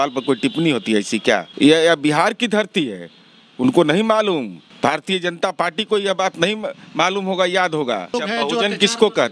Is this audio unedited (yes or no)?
no